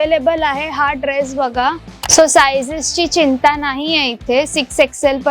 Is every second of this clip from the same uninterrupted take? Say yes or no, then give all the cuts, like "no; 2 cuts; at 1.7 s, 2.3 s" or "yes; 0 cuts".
no; 1 cut; at 2.0 s